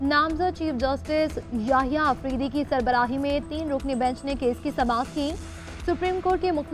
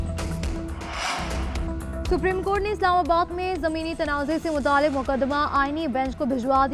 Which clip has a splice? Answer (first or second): second